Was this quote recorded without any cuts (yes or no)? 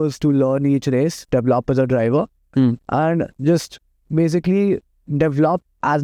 yes